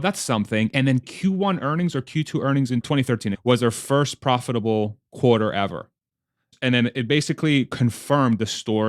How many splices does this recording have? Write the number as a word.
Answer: three